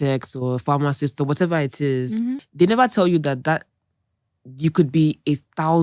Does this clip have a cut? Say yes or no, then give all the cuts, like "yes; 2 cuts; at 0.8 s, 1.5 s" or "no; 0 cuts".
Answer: yes; 1 cut; at 2.5 s